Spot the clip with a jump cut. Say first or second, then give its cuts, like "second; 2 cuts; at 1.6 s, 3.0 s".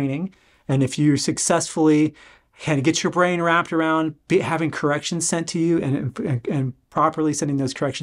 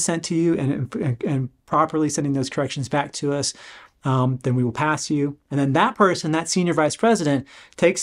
second; 1 cut; at 5.4 s